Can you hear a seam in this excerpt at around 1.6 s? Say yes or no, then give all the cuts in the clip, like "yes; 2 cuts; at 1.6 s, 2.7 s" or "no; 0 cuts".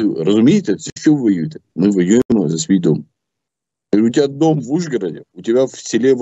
yes; 1 cut; at 1.6 s